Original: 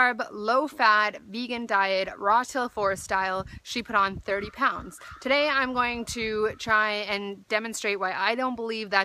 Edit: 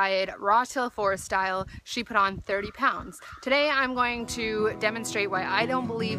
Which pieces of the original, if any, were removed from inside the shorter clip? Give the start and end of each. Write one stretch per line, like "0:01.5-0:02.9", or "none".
0:06.6-0:07.5